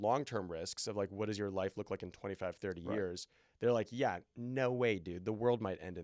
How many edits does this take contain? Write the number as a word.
zero